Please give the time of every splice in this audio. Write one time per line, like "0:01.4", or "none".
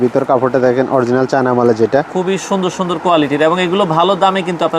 0:02.1

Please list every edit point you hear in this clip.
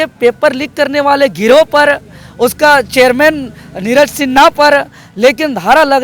none

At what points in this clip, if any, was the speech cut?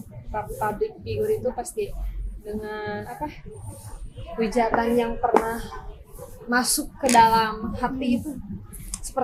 none

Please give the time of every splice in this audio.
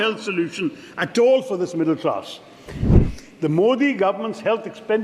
0:02.9

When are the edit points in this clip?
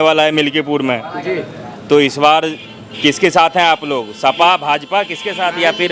none

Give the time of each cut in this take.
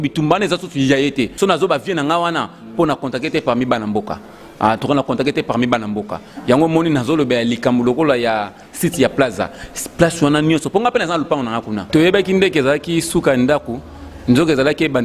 0:01.3
0:11.8

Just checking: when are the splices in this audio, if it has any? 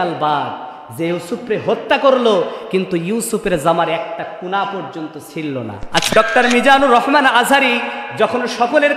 0:06.1

